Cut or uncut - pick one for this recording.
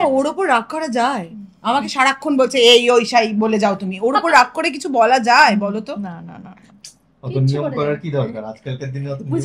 uncut